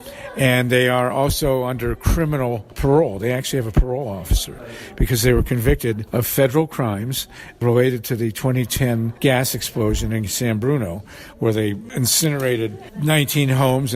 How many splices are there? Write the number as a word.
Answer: six